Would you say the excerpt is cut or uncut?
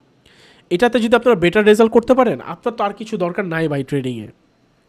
uncut